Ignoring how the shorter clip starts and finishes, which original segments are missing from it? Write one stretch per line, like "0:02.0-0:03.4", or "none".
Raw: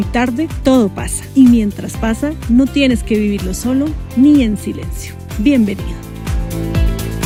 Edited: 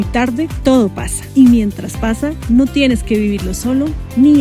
none

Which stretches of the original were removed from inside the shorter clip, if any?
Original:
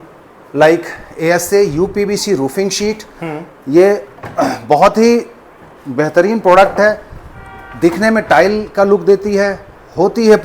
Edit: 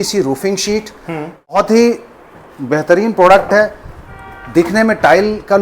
0:03.7-0:04.8

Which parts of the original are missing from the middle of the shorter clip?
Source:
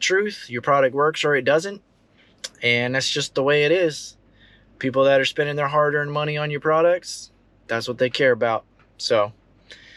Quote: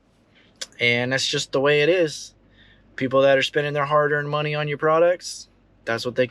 none

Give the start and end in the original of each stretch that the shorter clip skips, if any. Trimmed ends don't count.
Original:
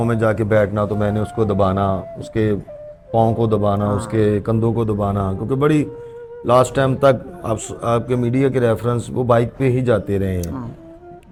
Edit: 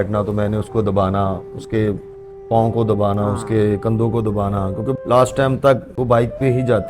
0:05.6-0:06.3
0:07.3-0:09.1

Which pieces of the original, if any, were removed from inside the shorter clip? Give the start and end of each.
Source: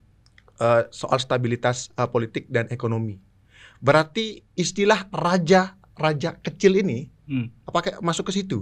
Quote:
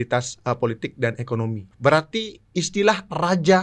0:03.2-0:03.7

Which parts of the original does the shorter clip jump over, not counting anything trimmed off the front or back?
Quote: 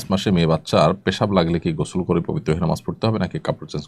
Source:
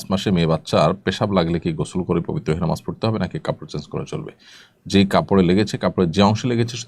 none

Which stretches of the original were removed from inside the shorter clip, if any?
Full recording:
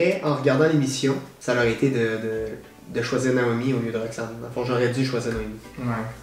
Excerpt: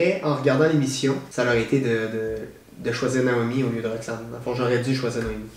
0:01.3-0:01.4

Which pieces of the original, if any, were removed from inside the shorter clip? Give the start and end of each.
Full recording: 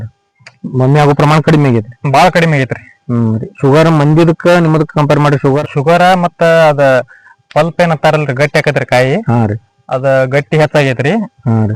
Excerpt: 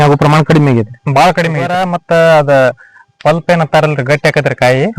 0:02.8-0:06.2

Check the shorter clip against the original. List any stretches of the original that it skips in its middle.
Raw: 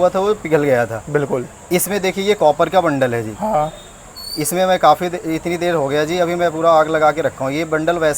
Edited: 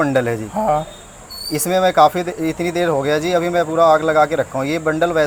none

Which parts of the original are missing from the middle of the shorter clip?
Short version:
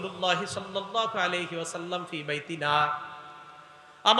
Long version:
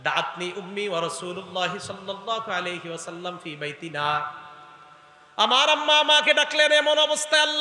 none

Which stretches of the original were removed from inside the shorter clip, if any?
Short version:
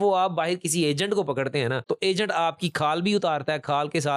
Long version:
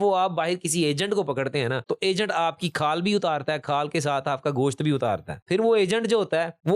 none

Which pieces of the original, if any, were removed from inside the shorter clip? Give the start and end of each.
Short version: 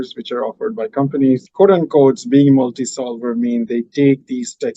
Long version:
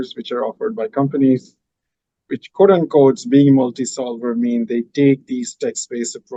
0:01.5-0:02.5

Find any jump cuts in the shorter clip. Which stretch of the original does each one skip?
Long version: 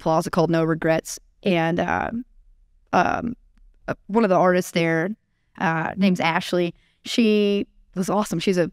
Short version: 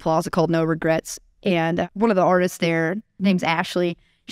0:01.9-0:04.0
0:05.3-0:05.9

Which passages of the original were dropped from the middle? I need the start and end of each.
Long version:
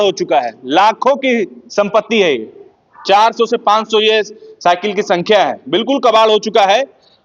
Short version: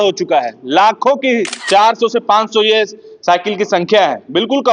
0:01.6-0:02.9

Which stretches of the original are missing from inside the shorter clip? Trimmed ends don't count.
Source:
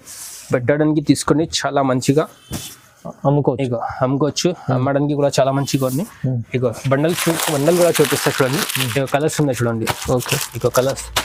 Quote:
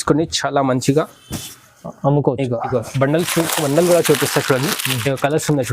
0:03.9-0:06.6

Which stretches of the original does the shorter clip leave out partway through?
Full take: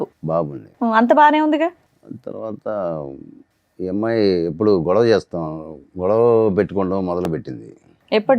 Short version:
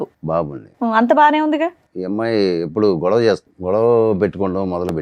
0:01.9-0:03.7
0:05.4-0:05.9

